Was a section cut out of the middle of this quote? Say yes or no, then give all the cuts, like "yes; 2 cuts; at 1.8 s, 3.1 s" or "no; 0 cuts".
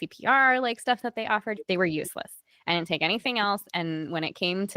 yes; 1 cut; at 1.6 s